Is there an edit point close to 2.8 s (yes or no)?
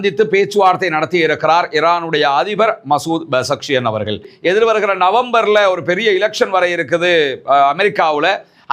no